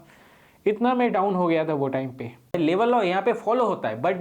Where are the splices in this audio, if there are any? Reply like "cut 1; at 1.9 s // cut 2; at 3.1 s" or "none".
cut 1; at 2.6 s